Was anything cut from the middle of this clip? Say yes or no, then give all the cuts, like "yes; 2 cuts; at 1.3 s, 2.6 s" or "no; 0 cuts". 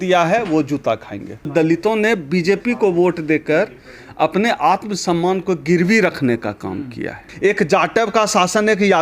yes; 2 cuts; at 1.5 s, 7.3 s